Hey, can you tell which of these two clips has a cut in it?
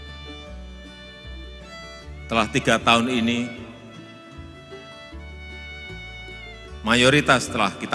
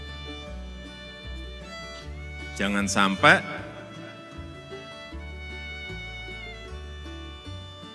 first; 3 cuts; at 2.3 s, 3.9 s, 6.8 s

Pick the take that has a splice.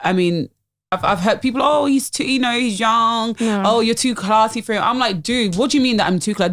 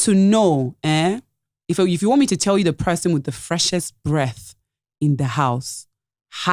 first; 1 cut; at 1.0 s

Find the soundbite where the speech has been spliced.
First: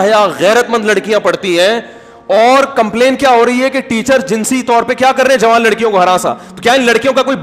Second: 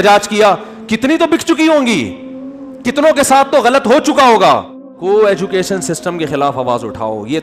second; 1 cut; at 4.9 s

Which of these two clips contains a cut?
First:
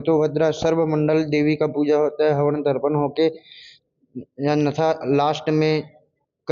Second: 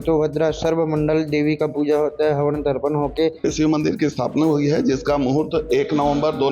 second; 1 cut; at 3.4 s

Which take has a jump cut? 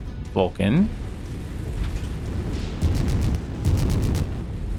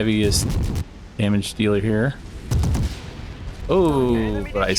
second; 1 cut; at 3.5 s

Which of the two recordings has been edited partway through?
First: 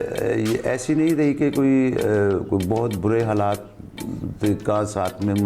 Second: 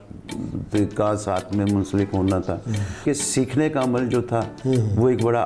second; 1 cut; at 3.0 s

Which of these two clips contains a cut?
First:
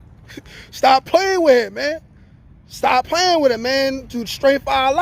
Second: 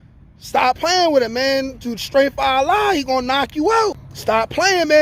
second; 1 cut; at 4.1 s

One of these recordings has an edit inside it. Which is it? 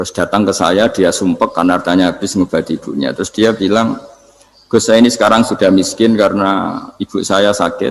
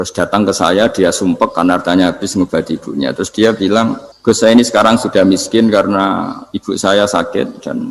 second; 1 cut; at 4.1 s

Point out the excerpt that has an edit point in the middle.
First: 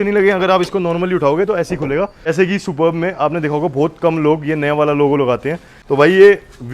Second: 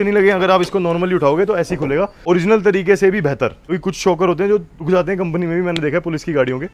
first; 2 cuts; at 2.1 s, 5.7 s

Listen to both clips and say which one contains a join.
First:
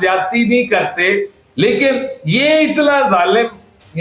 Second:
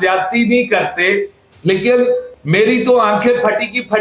first; 1 cut; at 1.4 s

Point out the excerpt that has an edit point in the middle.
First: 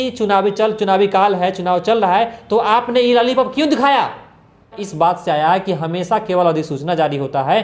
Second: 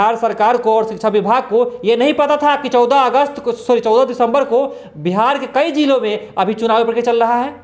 first; 1 cut; at 4.8 s

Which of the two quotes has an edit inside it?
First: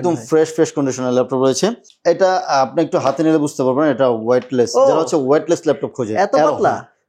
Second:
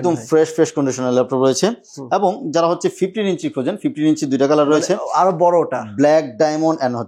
first; 1 cut; at 1.9 s

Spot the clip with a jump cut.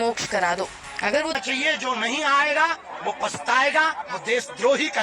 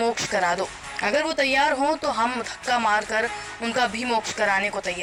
first; 1 cut; at 1.4 s

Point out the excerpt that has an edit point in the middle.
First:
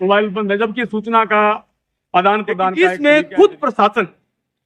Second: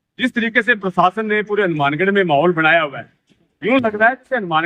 first; 1 cut; at 2.7 s

